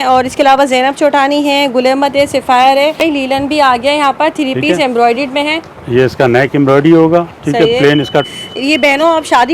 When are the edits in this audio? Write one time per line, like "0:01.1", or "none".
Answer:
0:03.0
0:08.3